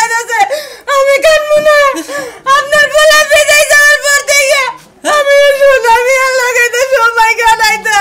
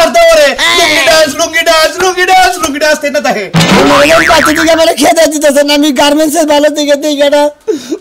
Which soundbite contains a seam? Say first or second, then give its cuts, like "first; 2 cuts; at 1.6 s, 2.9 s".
second; 1 cut; at 3.5 s